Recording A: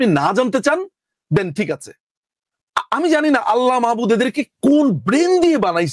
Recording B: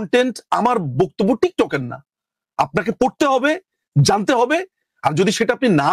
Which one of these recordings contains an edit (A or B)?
A